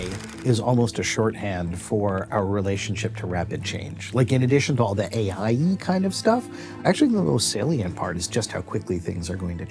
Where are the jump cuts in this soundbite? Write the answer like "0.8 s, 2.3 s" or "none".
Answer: none